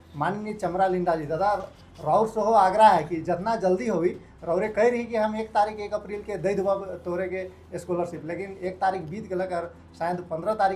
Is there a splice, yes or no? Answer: no